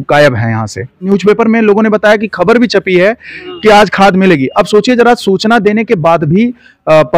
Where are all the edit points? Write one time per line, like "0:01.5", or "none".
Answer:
0:01.0

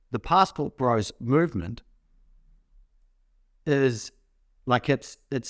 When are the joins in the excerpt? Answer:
none

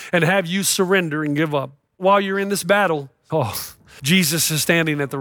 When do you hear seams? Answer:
0:02.0
0:03.4

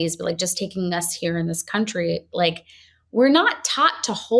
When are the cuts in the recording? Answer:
none

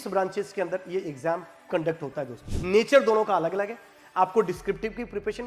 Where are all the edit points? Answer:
0:02.4

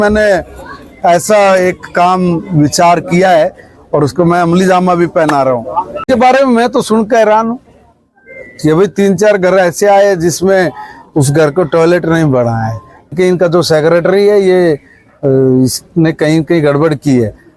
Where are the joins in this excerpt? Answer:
0:06.0
0:13.1

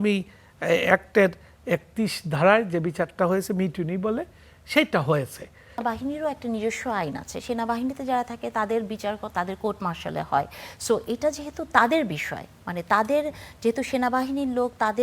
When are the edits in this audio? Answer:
0:05.8

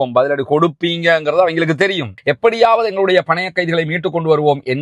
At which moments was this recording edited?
0:02.1

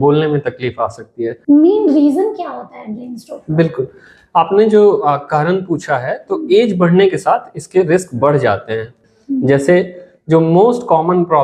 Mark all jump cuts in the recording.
0:01.4
0:09.0

